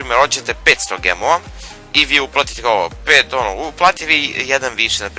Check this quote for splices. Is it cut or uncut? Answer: cut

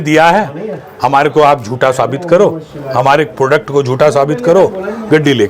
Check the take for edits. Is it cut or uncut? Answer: uncut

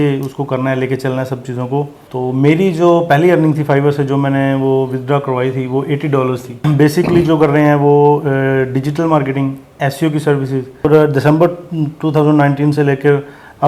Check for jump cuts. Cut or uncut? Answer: cut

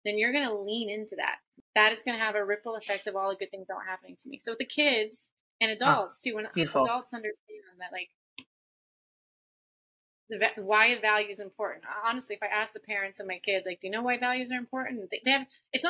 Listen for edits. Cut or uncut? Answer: cut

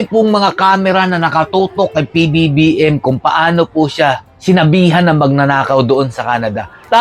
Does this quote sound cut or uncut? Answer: uncut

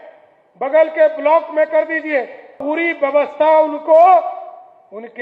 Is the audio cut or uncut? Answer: cut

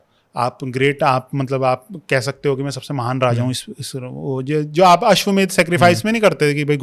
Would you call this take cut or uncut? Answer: uncut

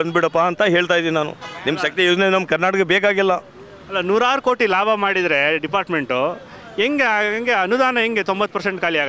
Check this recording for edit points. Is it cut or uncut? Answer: uncut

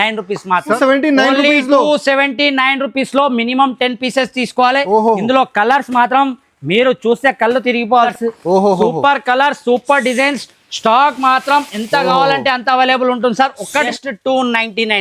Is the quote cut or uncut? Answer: cut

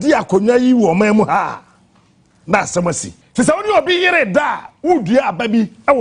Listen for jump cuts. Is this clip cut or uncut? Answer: cut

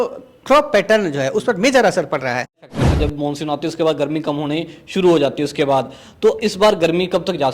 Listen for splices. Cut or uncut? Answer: cut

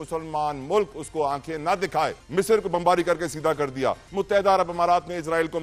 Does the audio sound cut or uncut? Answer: cut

